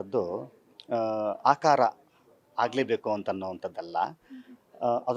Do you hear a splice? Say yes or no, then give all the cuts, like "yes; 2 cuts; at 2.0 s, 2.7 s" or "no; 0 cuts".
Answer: no; 0 cuts